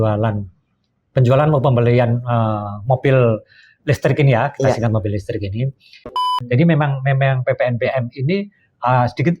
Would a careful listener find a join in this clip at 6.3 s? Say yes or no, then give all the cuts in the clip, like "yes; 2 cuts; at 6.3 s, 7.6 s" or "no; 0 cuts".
yes; 1 cut; at 6.3 s